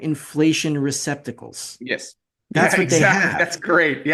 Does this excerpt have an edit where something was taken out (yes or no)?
no